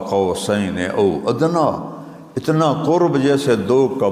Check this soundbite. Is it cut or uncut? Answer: uncut